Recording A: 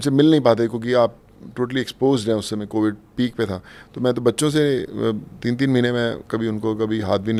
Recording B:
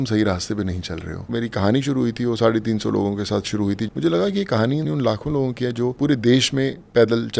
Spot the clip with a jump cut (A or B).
B